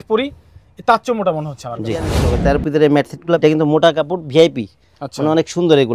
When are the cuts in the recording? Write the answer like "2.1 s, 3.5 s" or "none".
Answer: 2.2 s, 3.4 s